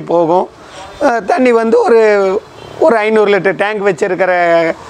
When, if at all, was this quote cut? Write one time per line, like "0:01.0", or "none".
none